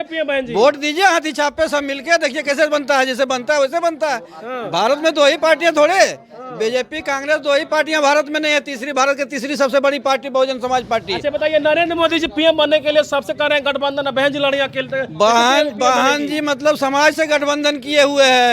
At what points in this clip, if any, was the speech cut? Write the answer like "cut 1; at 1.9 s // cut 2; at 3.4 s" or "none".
none